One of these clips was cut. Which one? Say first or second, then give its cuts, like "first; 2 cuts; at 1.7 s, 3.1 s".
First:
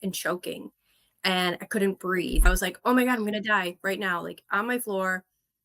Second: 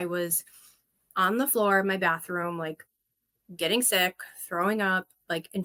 first; 1 cut; at 2.4 s